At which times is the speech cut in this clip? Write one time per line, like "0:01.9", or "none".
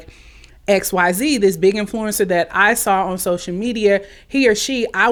none